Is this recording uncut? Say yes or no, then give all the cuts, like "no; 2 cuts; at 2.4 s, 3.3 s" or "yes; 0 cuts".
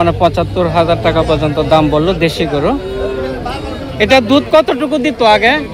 yes; 0 cuts